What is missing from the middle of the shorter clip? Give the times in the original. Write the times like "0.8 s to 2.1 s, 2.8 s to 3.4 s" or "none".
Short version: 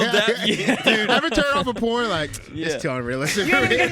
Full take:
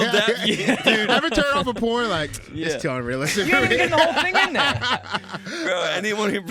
none